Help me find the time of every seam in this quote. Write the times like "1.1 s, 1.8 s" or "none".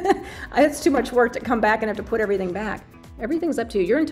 3.2 s

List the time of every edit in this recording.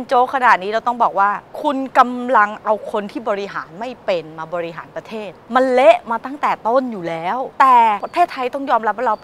1.5 s, 5.4 s, 7.5 s, 8.1 s

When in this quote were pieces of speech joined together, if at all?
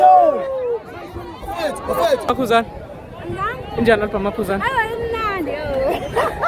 2.3 s

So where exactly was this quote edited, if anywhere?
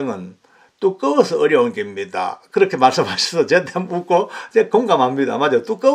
none

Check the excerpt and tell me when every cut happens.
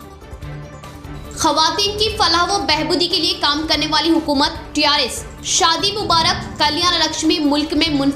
1.1 s

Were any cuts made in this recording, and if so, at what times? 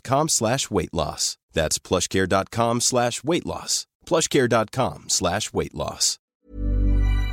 6.3 s

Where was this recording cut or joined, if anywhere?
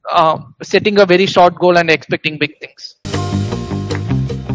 3.2 s

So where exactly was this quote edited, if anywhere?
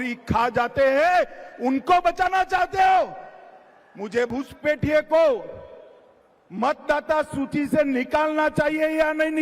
4.3 s

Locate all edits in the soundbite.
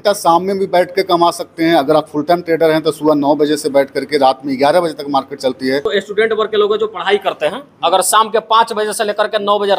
5.9 s

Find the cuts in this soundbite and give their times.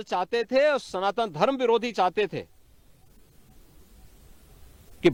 none

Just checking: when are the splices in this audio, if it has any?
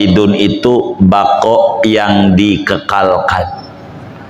none

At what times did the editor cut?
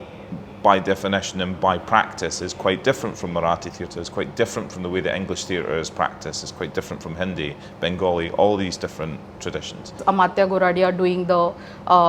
10.0 s

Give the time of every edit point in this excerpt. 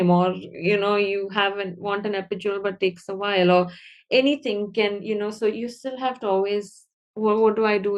none

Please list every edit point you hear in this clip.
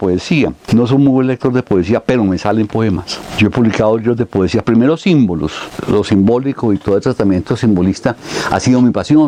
none

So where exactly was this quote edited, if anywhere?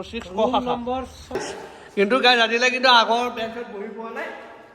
1.5 s

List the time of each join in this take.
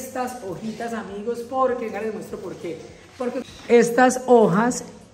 3.5 s

